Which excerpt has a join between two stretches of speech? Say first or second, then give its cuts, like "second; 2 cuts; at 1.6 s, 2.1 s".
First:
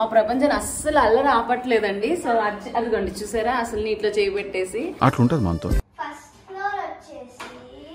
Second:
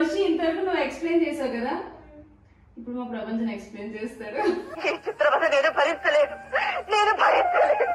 first; 1 cut; at 5.9 s